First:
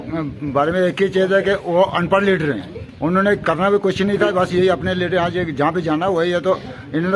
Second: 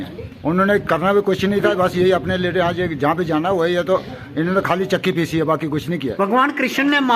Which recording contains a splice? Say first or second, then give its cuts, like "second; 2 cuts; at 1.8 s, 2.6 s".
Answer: second; 1 cut; at 6.1 s